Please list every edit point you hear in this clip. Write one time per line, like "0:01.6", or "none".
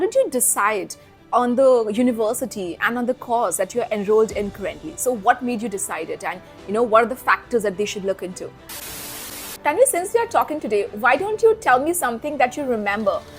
0:08.9